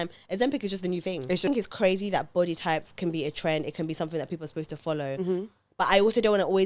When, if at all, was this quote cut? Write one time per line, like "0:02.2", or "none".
0:01.5